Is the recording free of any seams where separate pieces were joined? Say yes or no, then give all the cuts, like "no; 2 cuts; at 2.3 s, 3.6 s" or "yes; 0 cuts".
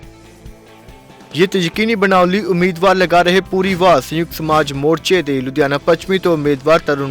no; 1 cut; at 1.2 s